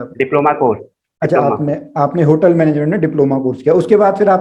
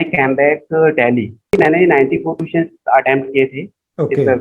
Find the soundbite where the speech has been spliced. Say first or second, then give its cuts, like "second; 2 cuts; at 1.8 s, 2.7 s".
second; 1 cut; at 1.5 s